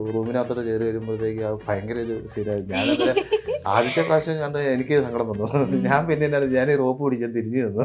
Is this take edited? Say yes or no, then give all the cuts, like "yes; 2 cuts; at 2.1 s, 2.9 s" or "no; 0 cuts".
no; 0 cuts